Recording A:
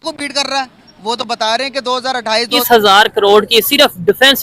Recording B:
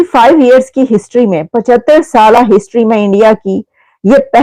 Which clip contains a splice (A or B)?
A